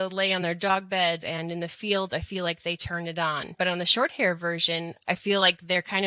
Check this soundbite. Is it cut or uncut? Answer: cut